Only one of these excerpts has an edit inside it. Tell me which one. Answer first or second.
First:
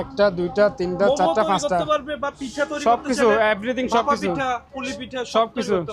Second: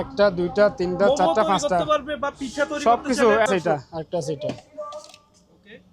second